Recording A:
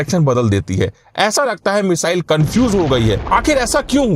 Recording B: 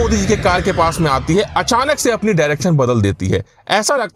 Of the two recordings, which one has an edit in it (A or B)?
A